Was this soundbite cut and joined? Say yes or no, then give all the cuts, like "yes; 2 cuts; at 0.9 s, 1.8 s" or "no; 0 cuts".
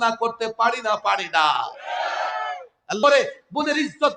yes; 1 cut; at 3.0 s